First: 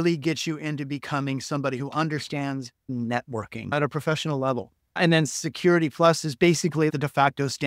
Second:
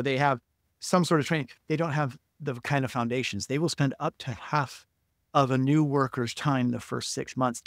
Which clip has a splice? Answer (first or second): first